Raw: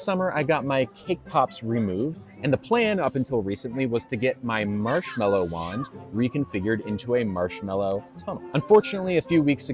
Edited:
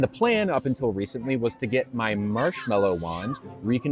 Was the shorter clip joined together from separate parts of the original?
no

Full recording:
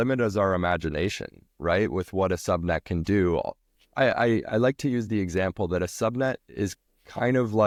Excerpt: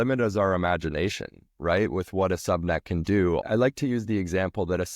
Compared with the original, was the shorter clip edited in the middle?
yes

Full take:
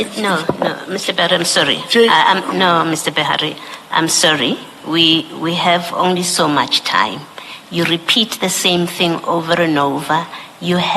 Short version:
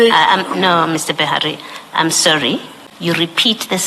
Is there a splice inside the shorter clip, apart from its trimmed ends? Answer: yes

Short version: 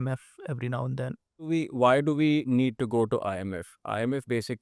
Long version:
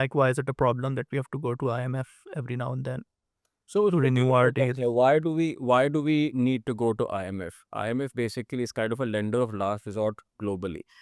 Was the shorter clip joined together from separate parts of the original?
yes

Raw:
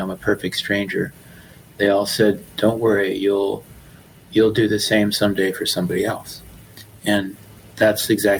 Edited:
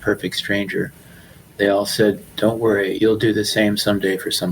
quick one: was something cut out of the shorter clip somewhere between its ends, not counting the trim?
yes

